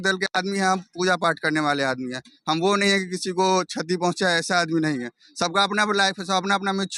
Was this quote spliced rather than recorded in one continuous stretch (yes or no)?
no